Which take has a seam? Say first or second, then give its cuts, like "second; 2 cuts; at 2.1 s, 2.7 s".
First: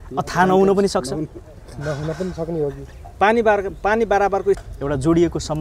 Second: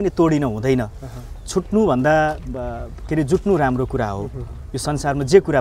first; 1 cut; at 4.7 s